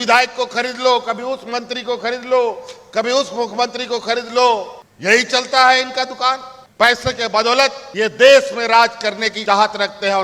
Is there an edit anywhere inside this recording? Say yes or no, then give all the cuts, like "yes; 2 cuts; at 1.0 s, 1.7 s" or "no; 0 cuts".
yes; 2 cuts; at 7.8 s, 9.3 s